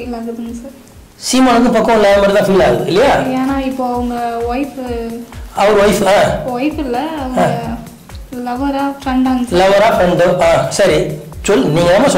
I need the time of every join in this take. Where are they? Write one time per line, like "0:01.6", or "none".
none